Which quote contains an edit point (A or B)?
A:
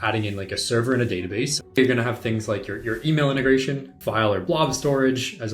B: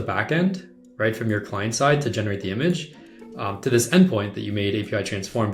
A